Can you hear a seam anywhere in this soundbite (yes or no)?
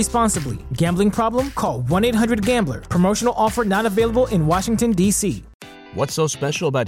yes